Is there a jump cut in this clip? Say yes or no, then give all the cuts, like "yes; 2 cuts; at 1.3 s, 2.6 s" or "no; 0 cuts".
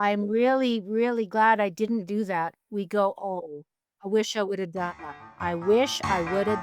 yes; 2 cuts; at 3.3 s, 5.1 s